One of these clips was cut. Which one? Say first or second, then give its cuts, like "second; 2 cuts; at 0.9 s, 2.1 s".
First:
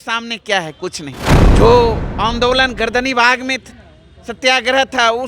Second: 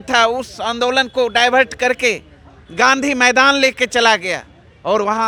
first; 1 cut; at 1.3 s